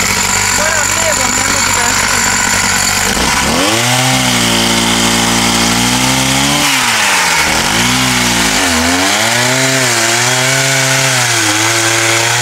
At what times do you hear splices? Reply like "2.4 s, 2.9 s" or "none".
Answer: 3.2 s

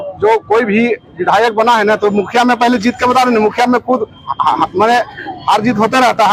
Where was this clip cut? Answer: none

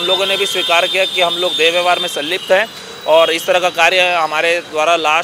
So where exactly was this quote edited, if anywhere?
none

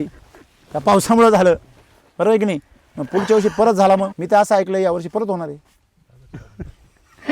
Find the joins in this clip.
4.2 s

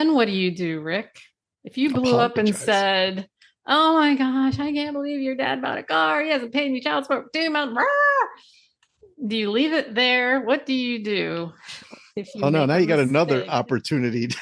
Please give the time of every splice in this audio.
none

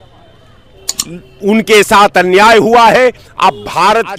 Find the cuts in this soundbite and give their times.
none

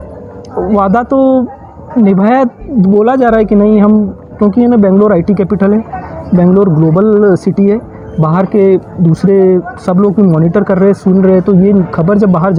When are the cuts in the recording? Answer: none

